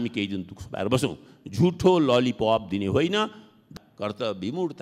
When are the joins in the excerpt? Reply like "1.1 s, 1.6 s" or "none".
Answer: 3.7 s

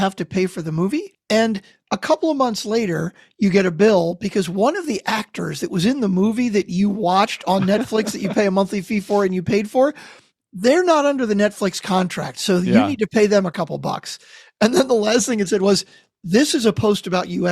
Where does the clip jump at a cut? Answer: 1.1 s

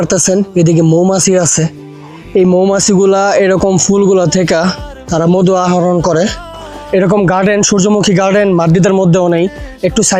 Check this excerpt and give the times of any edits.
6.7 s

